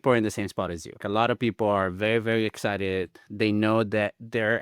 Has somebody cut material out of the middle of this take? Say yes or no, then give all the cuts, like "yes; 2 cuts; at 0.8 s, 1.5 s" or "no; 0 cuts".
yes; 1 cut; at 1.0 s